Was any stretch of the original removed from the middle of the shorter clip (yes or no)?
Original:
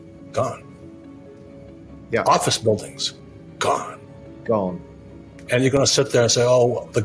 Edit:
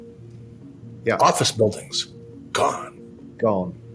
no